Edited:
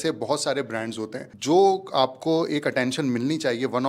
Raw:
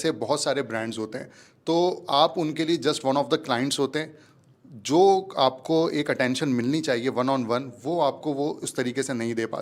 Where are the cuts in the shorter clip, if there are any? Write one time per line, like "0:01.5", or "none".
0:01.3